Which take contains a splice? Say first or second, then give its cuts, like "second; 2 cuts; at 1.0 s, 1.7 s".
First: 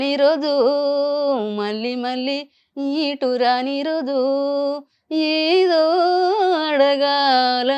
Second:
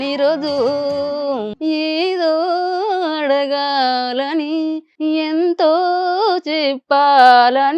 second; 2 cuts; at 1.5 s, 4.9 s